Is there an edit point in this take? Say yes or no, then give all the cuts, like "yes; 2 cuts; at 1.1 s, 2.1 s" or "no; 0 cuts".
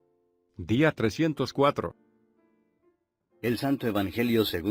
no; 0 cuts